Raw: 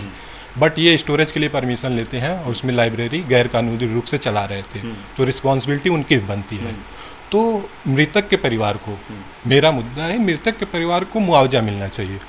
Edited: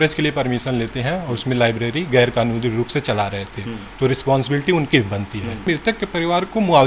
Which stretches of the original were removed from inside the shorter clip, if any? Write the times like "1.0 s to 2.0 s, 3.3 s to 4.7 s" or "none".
6.8 s to 10.3 s